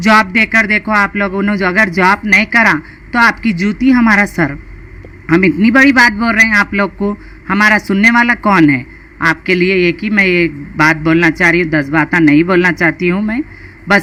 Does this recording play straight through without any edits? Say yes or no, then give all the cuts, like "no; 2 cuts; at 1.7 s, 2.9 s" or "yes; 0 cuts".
yes; 0 cuts